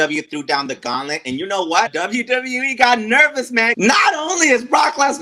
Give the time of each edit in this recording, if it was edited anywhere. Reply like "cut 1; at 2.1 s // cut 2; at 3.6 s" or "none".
cut 1; at 1.9 s // cut 2; at 3.7 s